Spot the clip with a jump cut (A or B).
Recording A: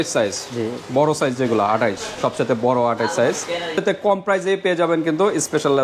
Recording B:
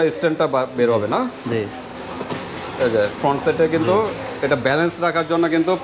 A